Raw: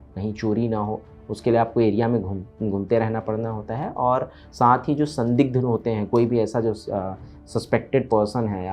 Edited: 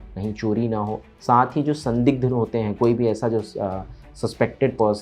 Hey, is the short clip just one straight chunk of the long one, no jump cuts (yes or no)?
no